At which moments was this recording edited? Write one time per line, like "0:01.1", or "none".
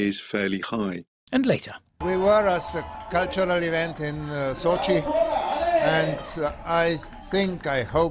0:01.4